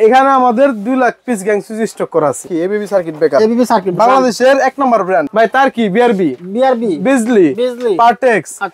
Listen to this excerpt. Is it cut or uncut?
cut